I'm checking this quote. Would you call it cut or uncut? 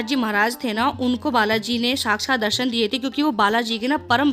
uncut